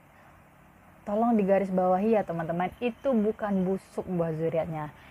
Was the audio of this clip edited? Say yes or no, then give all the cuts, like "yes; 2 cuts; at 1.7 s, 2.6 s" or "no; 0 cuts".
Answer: no; 0 cuts